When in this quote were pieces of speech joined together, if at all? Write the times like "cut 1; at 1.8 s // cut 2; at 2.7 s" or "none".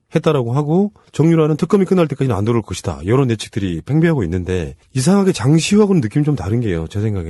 none